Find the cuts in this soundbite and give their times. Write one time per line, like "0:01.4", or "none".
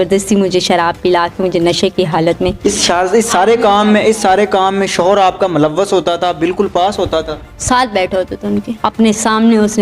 0:08.8